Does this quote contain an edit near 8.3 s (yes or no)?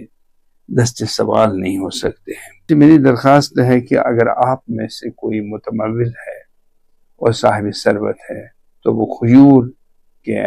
no